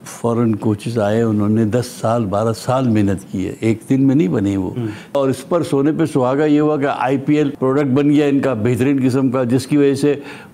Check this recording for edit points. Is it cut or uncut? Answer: cut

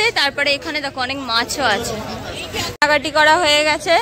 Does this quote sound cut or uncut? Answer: cut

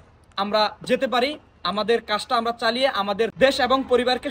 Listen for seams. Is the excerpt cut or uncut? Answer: uncut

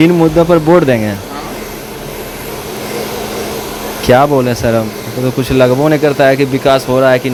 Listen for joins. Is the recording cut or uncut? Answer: uncut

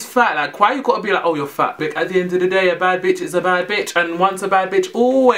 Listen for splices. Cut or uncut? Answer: cut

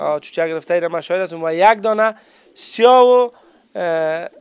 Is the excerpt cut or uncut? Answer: uncut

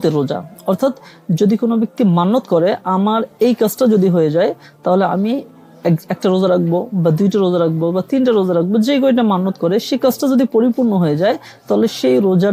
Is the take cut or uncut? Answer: uncut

